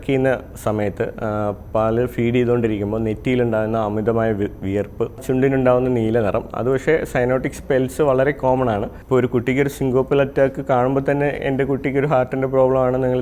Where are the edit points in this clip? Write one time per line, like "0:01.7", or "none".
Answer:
0:05.2
0:08.9